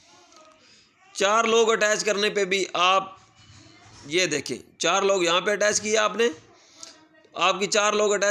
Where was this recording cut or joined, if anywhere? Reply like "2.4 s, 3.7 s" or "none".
none